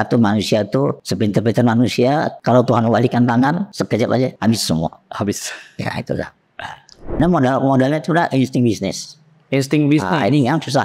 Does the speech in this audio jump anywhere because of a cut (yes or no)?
yes